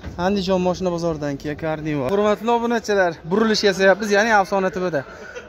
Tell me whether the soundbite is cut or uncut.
cut